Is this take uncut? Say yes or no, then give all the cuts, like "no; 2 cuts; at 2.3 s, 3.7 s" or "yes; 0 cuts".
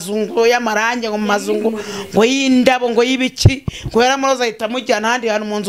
yes; 0 cuts